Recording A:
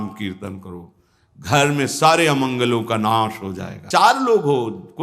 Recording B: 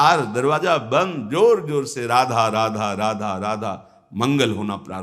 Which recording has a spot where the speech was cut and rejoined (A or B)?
A